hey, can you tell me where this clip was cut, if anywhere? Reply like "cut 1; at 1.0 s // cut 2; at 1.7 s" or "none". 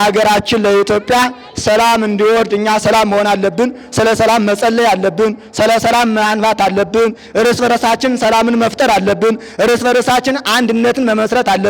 none